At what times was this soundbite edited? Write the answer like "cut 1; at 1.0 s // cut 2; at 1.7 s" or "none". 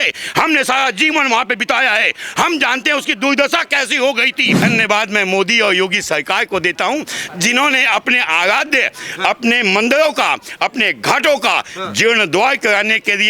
cut 1; at 4.6 s